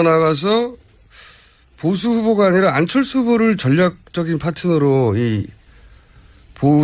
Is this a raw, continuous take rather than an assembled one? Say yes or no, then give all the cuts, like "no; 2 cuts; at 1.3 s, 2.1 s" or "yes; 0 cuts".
no; 1 cut; at 4.5 s